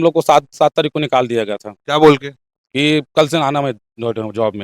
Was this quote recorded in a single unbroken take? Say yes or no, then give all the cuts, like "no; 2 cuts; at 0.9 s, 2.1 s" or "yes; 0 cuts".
yes; 0 cuts